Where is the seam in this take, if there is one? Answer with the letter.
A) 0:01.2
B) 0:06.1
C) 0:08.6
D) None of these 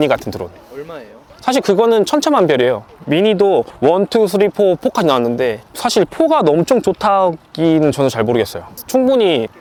D